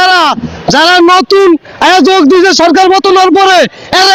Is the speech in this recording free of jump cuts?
yes; 0 cuts

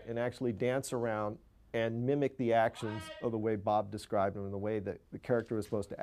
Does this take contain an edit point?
no; 0 cuts

